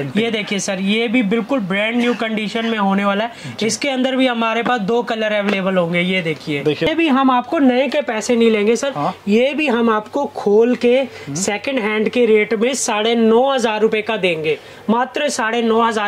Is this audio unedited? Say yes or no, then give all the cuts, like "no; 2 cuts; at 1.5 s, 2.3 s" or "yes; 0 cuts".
no; 1 cut; at 6.9 s